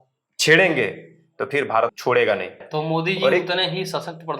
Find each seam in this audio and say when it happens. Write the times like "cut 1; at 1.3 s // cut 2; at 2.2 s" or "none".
cut 1; at 2.0 s // cut 2; at 2.6 s